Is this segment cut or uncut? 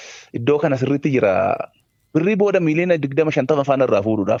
uncut